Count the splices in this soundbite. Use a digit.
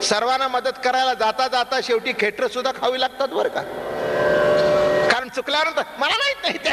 0